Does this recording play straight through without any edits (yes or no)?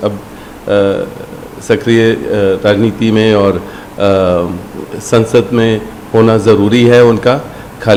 yes